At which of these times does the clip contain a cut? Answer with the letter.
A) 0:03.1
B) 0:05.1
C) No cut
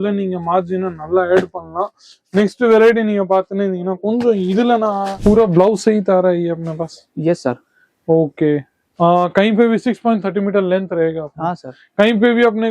B